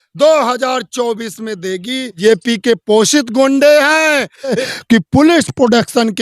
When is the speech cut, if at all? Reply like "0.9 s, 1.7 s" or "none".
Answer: 2.1 s, 4.6 s